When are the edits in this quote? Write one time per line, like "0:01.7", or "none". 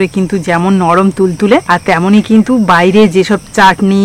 0:01.6

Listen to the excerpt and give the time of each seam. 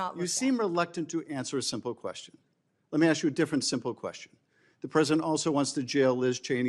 none

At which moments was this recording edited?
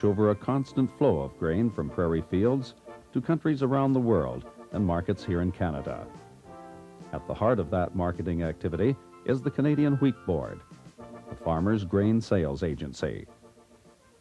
0:08.7

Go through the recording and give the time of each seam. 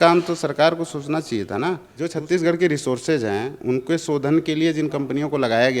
0:01.9

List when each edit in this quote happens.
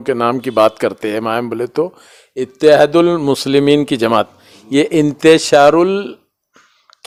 none

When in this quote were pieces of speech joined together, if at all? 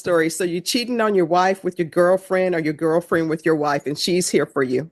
none

